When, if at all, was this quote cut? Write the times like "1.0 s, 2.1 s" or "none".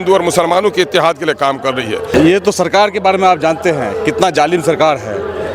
2.1 s